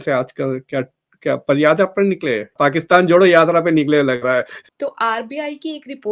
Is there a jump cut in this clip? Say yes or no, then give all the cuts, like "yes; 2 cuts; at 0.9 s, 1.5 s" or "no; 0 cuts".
yes; 2 cuts; at 2.5 s, 4.7 s